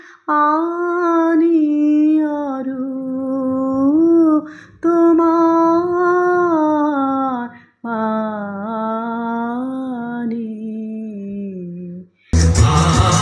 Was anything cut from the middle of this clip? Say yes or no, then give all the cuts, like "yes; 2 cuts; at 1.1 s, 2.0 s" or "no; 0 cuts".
yes; 1 cut; at 12.2 s